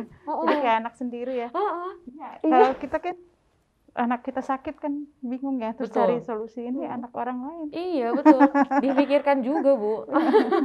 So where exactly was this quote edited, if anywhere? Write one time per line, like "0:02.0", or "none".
none